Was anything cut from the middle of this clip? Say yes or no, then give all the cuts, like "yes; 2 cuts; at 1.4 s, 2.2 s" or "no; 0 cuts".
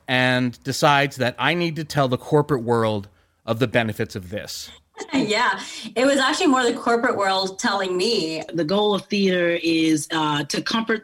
yes; 1 cut; at 8.5 s